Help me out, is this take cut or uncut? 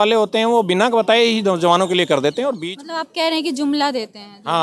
cut